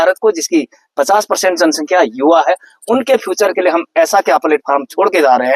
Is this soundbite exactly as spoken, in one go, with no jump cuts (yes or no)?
yes